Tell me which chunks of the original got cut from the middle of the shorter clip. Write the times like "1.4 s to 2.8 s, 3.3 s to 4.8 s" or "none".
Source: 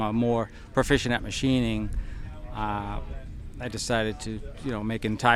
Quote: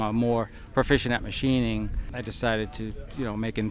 2.0 s to 3.5 s